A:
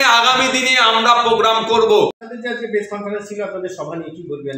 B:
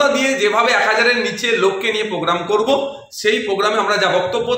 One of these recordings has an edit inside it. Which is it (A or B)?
A